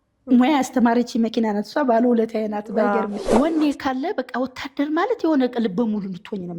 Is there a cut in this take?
yes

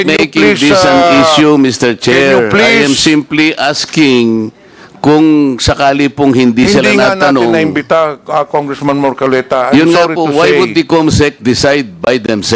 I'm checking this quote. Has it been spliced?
no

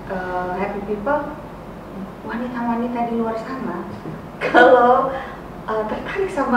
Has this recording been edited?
no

